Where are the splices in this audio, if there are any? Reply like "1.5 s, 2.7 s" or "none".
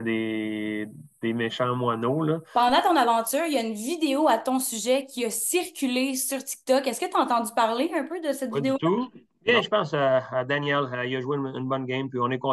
2.4 s, 9.3 s